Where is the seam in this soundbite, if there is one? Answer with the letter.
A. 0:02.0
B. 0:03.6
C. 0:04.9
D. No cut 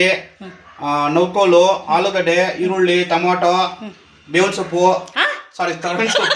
D